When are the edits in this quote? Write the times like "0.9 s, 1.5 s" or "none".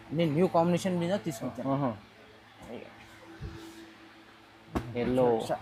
none